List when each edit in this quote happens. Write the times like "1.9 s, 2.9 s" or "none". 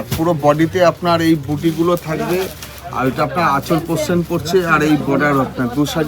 none